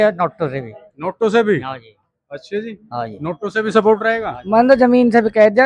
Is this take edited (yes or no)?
no